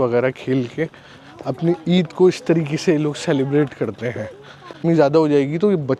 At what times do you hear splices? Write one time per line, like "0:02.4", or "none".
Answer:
0:04.8